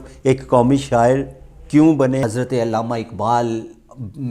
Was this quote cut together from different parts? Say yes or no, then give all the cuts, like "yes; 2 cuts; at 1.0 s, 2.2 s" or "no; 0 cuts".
yes; 1 cut; at 2.2 s